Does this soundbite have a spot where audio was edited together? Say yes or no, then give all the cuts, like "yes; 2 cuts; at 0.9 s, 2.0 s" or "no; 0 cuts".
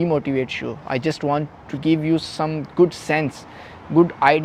no; 0 cuts